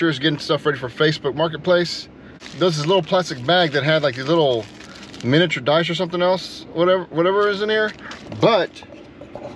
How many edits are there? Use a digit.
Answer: 1